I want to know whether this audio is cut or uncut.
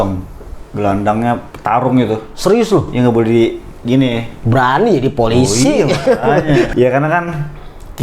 cut